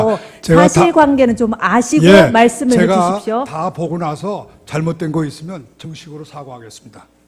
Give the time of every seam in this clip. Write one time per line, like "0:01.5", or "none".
0:04.6